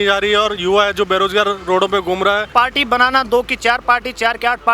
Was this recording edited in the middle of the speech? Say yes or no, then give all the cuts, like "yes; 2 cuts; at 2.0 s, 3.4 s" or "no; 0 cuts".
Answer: yes; 1 cut; at 2.5 s